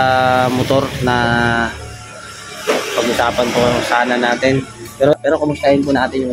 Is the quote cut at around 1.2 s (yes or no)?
no